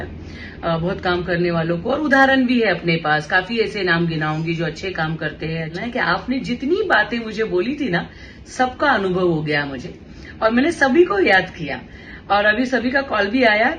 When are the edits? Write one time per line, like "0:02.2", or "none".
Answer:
0:05.8